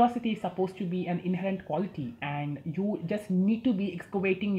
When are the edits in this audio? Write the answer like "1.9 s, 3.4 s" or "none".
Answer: none